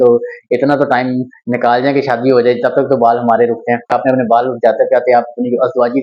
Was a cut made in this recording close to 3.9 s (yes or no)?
yes